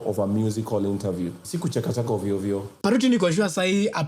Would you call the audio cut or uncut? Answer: cut